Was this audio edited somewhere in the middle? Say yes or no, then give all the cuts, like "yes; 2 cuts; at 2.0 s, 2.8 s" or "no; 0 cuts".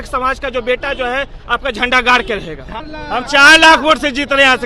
yes; 1 cut; at 2.8 s